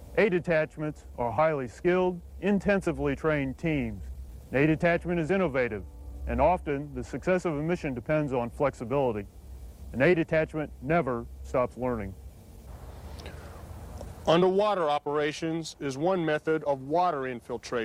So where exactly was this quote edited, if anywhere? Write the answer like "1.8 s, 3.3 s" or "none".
11.0 s